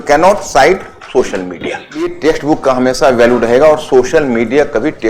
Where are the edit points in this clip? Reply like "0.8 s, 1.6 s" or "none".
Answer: 2.1 s